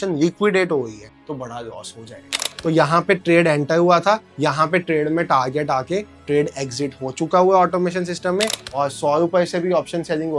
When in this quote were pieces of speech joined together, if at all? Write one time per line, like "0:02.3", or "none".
0:02.5
0:08.6